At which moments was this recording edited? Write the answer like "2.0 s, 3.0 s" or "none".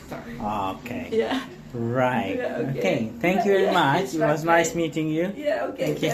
none